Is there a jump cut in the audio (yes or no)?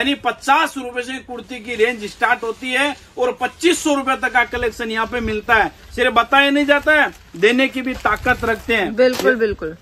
no